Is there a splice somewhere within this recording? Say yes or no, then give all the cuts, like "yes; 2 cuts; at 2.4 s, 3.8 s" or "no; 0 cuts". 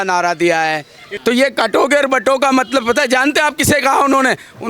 yes; 1 cut; at 1.1 s